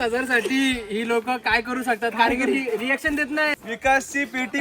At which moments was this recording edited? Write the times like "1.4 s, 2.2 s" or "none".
3.6 s